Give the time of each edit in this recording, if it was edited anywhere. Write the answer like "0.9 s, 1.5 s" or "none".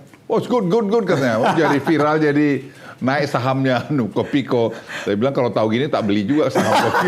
none